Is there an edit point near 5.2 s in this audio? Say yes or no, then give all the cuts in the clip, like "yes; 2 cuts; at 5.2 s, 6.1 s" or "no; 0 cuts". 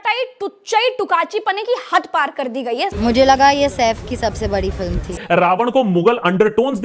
yes; 2 cuts; at 2.9 s, 5.2 s